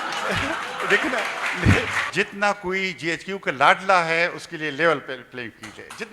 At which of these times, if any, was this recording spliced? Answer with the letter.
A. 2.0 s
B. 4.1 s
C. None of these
A